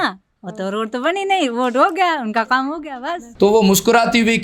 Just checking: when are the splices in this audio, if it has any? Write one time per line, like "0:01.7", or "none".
0:03.2